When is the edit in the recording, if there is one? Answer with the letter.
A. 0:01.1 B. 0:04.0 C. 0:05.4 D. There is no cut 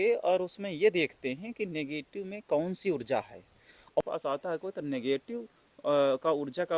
B